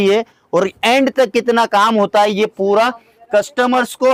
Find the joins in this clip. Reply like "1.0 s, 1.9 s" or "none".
none